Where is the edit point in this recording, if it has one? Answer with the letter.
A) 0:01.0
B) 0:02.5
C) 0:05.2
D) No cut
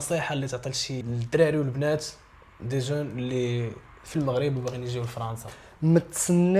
A